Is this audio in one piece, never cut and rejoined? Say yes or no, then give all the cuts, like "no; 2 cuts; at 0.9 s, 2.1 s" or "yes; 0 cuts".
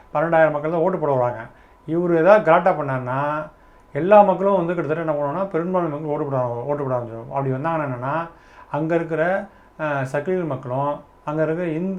yes; 0 cuts